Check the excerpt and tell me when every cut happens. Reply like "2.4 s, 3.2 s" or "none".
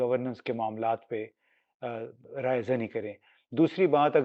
none